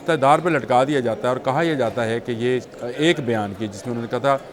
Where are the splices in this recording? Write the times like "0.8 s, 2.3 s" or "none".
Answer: 2.7 s